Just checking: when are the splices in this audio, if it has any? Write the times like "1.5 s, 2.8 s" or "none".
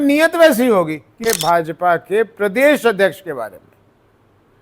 1.2 s